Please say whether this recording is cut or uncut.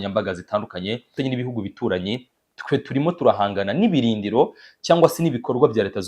cut